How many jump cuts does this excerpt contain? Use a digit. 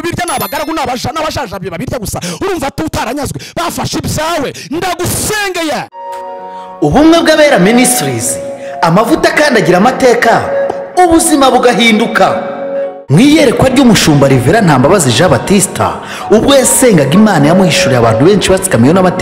1